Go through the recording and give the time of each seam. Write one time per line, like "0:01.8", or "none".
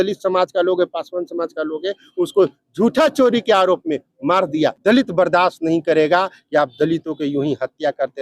0:04.8